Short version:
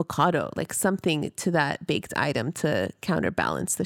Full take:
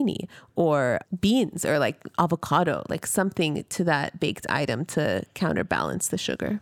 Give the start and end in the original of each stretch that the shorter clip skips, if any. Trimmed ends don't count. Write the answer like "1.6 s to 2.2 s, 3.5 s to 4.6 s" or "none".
none